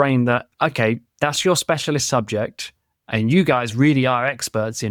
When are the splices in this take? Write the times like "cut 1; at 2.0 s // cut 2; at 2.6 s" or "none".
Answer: none